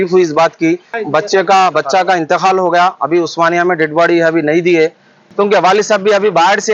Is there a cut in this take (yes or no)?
yes